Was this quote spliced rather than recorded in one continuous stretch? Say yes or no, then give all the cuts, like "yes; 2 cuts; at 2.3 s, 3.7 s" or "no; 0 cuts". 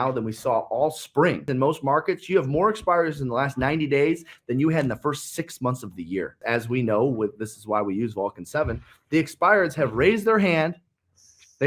yes; 2 cuts; at 1.5 s, 6.4 s